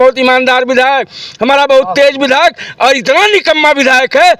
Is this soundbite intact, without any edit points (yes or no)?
yes